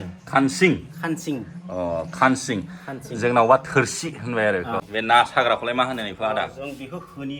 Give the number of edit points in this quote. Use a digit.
1